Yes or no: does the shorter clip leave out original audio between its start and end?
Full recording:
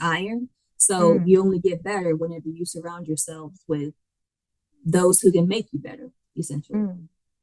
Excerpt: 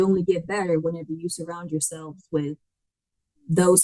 no